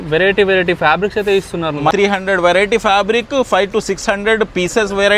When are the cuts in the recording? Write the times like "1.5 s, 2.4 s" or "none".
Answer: 1.9 s